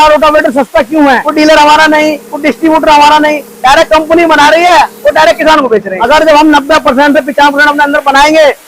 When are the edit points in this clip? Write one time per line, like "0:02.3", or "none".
0:01.3
0:05.9